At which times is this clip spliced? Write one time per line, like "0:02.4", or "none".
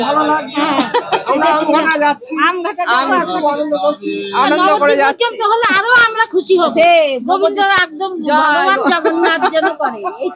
none

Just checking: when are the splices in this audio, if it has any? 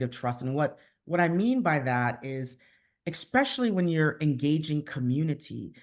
none

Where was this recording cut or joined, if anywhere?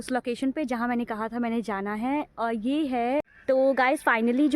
0:03.4

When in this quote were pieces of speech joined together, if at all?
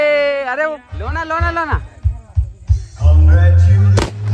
0:01.0

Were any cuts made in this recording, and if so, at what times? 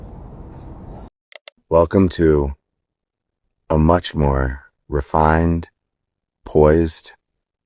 0:01.1

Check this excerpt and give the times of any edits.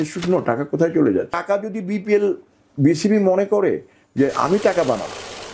0:01.4

